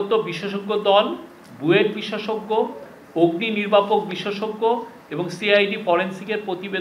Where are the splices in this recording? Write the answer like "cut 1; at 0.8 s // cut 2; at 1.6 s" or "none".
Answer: none